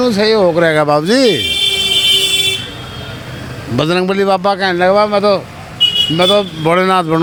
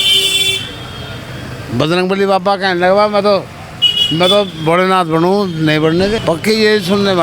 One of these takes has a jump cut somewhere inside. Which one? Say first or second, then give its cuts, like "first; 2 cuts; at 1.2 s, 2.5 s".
second; 1 cut; at 6.2 s